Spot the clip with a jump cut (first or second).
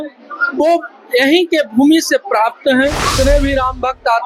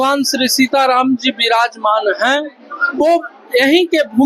first